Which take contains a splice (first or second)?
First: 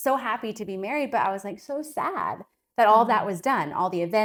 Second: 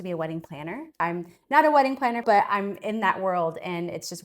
second